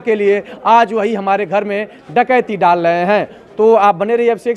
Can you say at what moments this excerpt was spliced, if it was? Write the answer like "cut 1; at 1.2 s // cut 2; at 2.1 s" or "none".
none